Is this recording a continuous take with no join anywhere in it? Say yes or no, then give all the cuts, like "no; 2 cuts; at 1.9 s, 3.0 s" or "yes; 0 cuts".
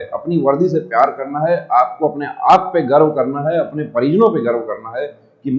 yes; 0 cuts